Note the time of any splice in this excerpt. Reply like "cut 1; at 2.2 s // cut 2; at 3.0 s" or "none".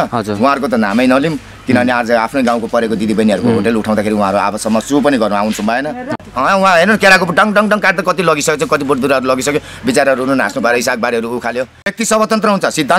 cut 1; at 6.2 s // cut 2; at 11.9 s